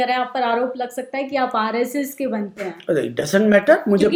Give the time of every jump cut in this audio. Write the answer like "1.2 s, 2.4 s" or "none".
none

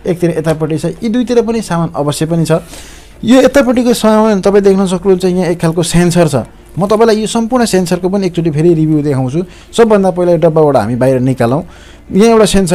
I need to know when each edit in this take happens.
none

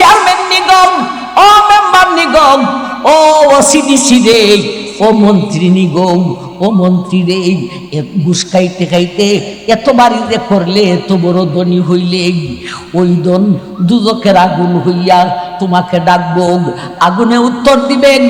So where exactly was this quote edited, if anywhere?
none

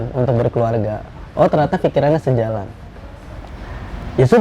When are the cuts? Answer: none

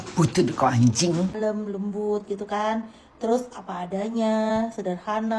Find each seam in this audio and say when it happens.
1.3 s

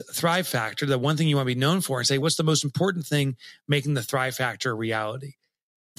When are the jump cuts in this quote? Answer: 2.2 s

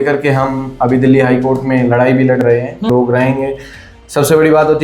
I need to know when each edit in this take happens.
2.9 s

